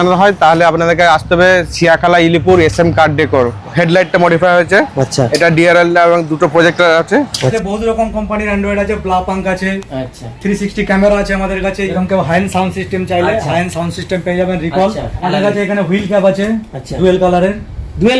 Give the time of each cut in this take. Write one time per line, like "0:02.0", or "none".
0:03.5
0:07.5
0:11.9
0:15.1